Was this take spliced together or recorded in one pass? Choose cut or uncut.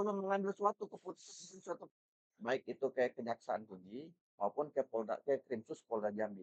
cut